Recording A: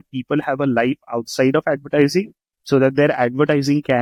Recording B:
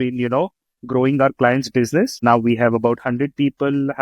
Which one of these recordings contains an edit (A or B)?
B